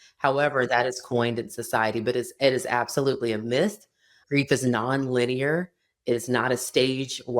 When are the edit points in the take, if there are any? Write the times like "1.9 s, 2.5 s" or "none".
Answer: 4.2 s